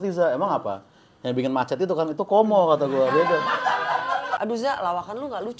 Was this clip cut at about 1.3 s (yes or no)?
no